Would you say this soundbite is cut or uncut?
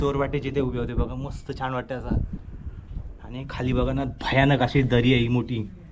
uncut